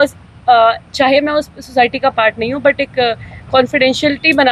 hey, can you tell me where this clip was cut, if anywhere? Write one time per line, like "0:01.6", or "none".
none